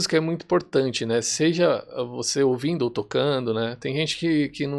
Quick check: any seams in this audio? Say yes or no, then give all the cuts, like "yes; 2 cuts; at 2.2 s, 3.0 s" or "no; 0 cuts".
no; 0 cuts